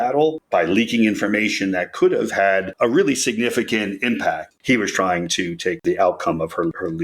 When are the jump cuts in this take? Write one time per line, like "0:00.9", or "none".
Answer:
0:04.5
0:05.8